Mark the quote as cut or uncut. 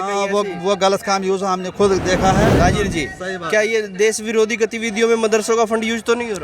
cut